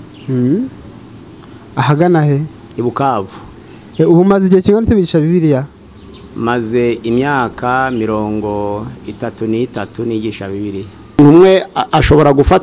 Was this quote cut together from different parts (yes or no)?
yes